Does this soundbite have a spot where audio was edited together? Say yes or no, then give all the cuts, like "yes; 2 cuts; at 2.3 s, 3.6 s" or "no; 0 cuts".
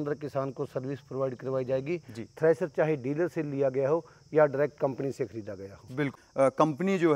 yes; 1 cut; at 6.1 s